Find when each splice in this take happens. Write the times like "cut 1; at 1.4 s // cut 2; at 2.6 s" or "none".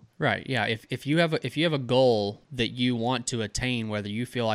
cut 1; at 2.4 s